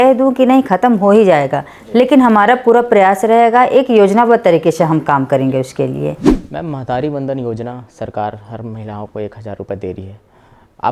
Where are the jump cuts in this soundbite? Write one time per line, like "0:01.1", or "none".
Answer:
0:06.3